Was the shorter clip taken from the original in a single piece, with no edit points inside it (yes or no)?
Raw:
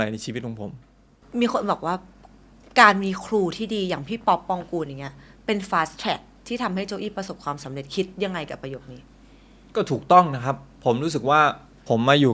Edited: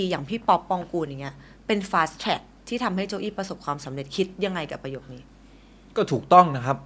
yes